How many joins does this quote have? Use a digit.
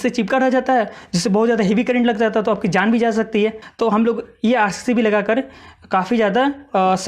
1